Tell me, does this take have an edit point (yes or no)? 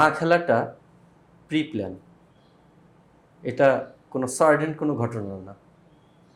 no